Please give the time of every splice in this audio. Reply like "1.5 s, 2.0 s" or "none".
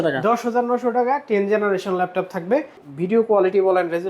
2.9 s